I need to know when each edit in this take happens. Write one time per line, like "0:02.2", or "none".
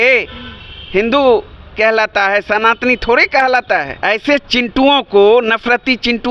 0:03.9